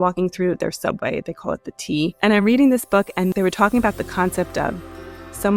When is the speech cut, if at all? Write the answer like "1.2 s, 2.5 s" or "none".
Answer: 2.1 s, 3.3 s